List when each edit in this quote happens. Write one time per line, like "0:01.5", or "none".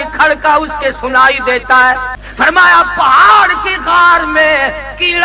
0:02.2